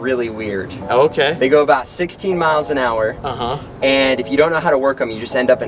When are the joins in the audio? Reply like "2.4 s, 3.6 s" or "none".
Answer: none